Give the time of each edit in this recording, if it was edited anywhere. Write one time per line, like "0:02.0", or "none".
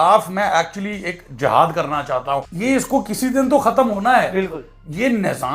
0:02.5